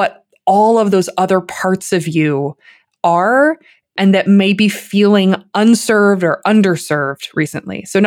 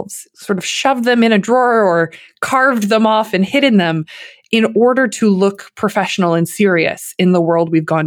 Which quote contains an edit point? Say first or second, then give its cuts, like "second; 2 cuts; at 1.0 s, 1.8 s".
first; 2 cuts; at 3.9 s, 5.5 s